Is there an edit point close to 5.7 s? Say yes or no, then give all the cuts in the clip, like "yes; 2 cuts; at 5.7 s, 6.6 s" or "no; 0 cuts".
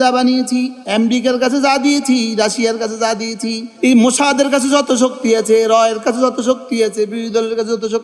no; 0 cuts